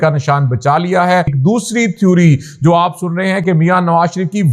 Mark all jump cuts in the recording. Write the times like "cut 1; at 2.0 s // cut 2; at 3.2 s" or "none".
cut 1; at 1.3 s